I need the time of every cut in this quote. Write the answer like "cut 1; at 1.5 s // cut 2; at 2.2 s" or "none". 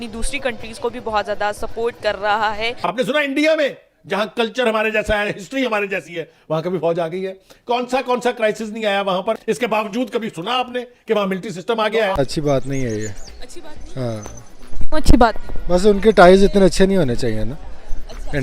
cut 1; at 2.7 s // cut 2; at 9.4 s // cut 3; at 12.2 s